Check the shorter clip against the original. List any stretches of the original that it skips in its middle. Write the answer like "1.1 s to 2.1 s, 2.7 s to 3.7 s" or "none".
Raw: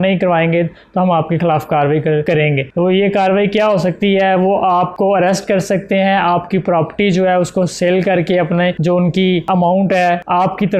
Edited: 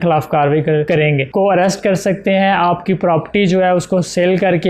2.7 s to 4.9 s